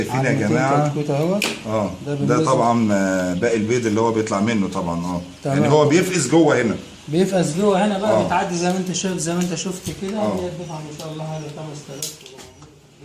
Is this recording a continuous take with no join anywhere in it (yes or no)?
yes